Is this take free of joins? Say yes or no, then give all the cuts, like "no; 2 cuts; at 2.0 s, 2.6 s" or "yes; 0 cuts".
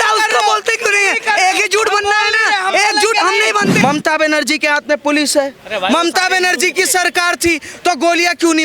no; 1 cut; at 3.7 s